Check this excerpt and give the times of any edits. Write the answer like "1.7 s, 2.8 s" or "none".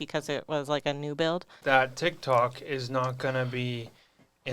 1.6 s